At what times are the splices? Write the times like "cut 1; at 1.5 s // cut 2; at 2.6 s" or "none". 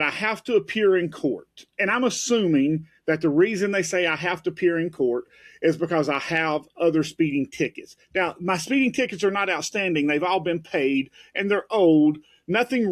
none